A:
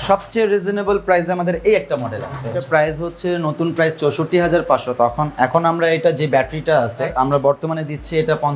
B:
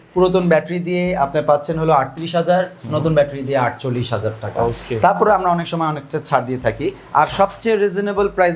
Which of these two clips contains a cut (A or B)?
A